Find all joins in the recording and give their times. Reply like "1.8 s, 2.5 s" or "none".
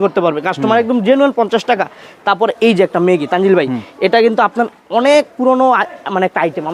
none

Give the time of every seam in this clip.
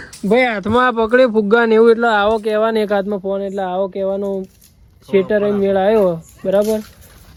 none

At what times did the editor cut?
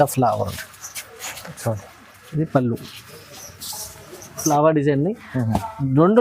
4.4 s

